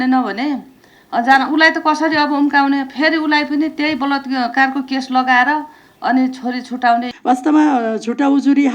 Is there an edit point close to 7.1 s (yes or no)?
yes